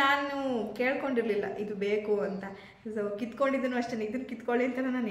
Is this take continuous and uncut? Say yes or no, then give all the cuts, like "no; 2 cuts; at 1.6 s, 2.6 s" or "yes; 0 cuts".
yes; 0 cuts